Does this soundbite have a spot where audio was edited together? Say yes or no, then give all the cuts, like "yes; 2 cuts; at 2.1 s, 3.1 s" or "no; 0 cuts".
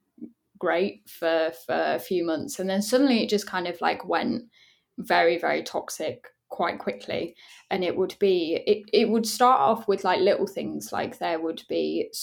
no; 0 cuts